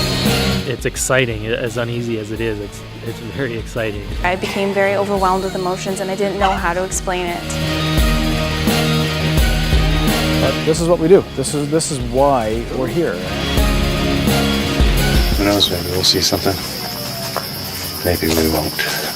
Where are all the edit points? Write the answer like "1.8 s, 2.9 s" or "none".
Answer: 14.5 s

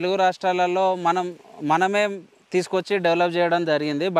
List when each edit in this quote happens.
none

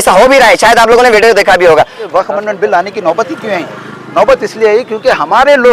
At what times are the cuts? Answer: 2.0 s

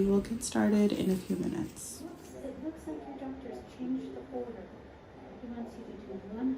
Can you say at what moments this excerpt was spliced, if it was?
2.1 s

